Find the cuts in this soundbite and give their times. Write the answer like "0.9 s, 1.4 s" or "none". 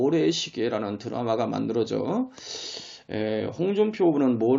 none